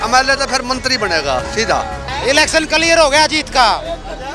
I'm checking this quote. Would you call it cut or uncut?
cut